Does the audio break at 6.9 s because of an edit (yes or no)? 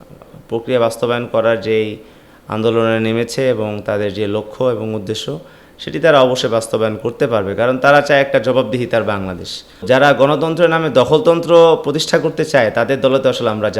no